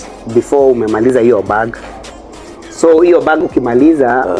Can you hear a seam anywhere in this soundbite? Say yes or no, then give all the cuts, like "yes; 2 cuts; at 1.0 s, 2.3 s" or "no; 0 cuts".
no; 0 cuts